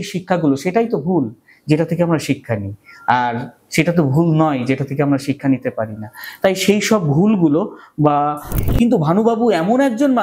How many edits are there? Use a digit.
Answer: 1